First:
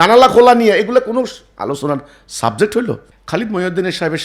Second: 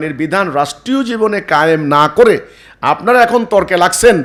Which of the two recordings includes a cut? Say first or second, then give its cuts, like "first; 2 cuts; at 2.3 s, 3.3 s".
first; 1 cut; at 3.1 s